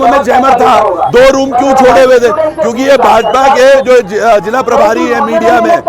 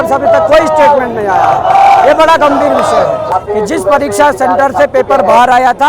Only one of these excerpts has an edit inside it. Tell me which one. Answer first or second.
second